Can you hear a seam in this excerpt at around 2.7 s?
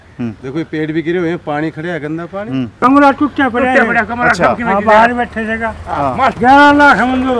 yes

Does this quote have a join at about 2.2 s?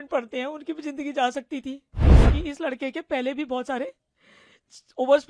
yes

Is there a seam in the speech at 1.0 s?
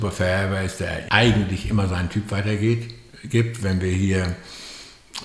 yes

